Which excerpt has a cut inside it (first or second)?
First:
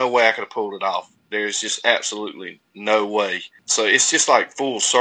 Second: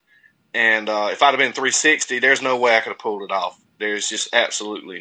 first